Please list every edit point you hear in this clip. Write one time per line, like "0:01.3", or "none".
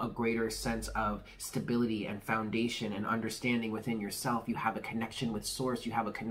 none